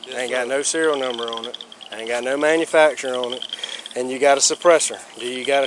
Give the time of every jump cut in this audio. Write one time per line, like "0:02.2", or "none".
none